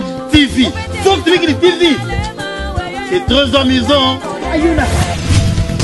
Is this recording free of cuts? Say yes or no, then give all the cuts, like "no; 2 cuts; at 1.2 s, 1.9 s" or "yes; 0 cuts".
yes; 0 cuts